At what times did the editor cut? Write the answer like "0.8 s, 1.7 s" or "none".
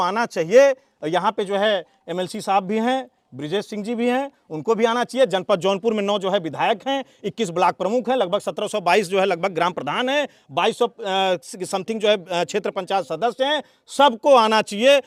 none